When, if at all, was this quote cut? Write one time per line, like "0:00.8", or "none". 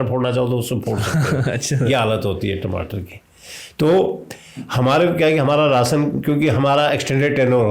none